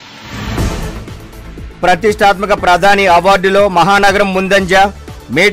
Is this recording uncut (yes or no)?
yes